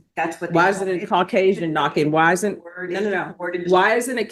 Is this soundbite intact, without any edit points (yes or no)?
yes